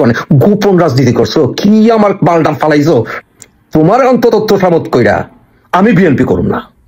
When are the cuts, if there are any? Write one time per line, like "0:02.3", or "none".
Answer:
0:03.1